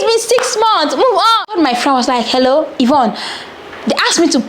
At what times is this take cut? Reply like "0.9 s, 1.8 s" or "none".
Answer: 1.5 s